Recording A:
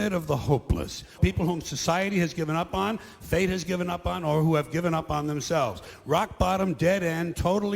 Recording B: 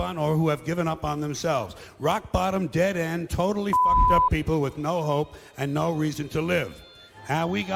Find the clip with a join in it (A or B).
A